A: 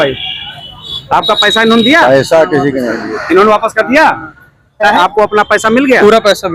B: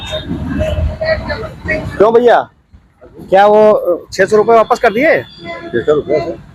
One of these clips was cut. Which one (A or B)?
A